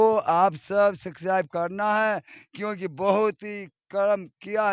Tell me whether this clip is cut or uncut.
uncut